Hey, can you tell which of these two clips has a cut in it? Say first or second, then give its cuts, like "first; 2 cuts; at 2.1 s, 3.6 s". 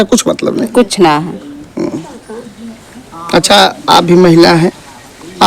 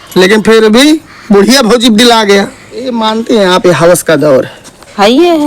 second; 1 cut; at 2.9 s